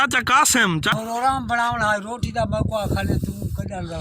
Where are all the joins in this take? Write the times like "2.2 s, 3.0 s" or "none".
0.9 s